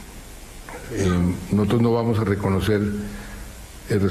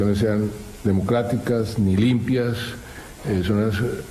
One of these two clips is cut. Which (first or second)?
second